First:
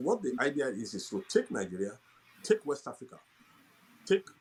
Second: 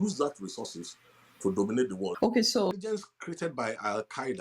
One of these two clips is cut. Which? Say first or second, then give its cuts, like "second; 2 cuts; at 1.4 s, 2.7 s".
second; 1 cut; at 2.7 s